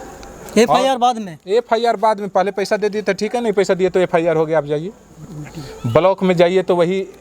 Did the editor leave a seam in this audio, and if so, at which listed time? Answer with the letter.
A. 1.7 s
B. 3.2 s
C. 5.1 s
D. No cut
D